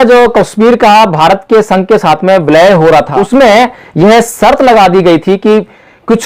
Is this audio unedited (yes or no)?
no